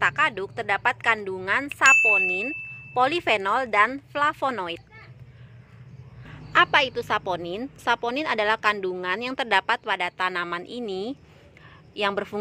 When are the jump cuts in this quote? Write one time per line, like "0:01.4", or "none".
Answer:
0:06.3

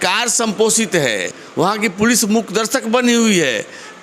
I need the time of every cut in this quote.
0:01.4

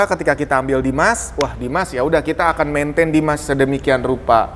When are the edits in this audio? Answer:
none

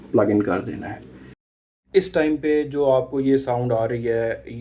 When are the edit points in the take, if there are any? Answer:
0:01.3

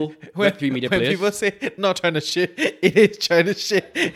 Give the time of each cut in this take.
none

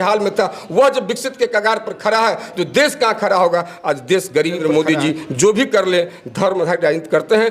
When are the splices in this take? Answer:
0:04.6

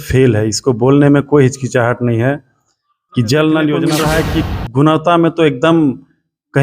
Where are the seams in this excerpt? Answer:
0:03.9

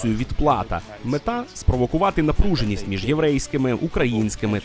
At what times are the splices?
0:00.9

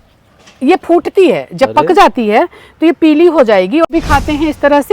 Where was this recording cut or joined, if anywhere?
0:03.9

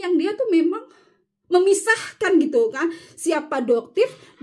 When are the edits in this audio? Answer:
none

